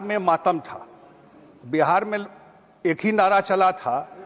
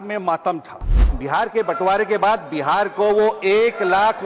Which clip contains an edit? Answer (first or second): second